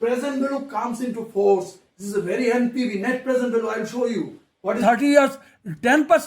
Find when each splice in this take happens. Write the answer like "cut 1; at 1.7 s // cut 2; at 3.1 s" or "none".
cut 1; at 4.8 s